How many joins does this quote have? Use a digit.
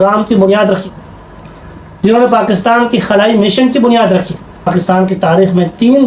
1